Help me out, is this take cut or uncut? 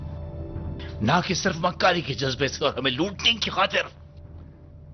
uncut